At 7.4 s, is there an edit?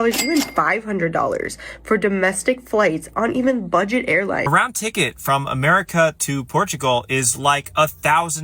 no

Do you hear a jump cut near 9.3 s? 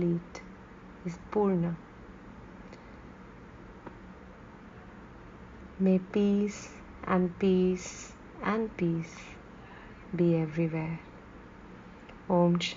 no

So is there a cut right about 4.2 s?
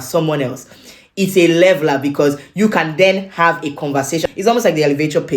yes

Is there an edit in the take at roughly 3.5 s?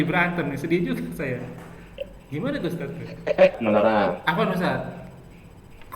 yes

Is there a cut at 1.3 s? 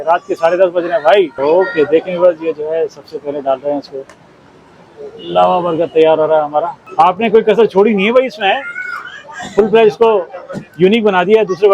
yes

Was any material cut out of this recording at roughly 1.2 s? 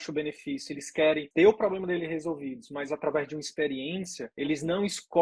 yes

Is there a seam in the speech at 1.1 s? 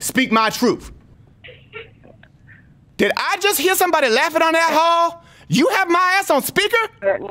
yes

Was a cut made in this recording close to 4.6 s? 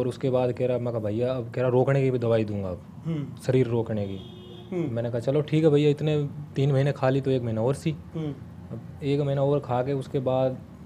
no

